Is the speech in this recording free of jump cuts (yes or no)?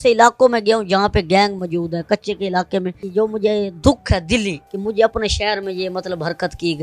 no